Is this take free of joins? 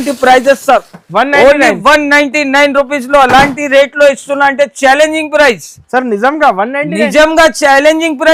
yes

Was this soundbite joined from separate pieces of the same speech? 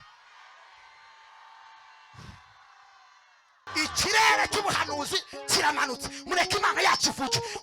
yes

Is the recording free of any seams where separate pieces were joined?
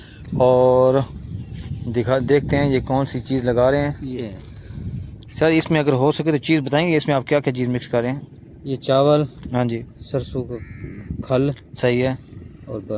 yes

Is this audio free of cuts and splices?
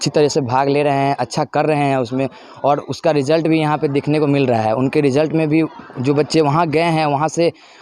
yes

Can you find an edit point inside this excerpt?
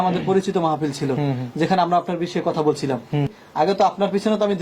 yes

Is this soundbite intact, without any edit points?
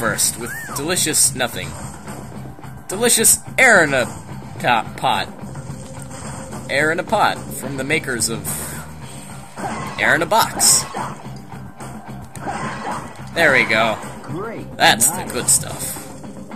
yes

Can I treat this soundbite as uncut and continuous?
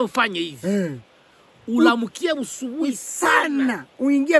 yes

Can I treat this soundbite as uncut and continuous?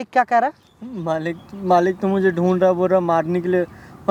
yes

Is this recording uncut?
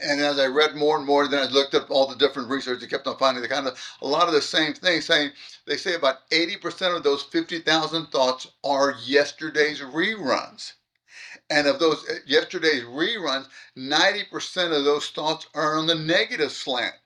yes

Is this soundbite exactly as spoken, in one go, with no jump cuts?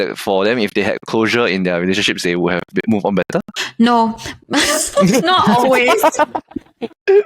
yes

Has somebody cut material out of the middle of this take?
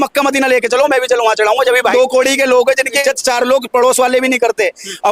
yes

